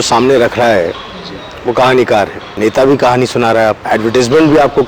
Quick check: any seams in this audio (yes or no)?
yes